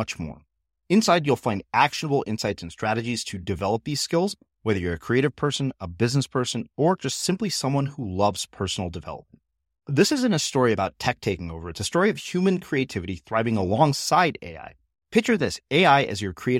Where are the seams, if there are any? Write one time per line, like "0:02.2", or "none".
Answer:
none